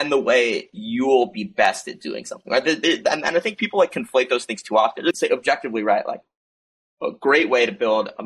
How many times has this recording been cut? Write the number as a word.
one